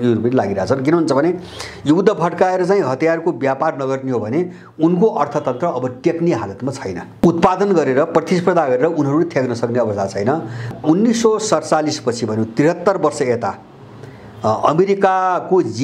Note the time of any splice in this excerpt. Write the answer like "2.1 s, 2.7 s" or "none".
none